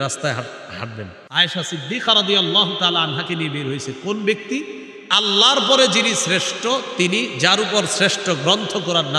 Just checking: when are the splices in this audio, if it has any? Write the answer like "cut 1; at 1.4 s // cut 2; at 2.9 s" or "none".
cut 1; at 1.2 s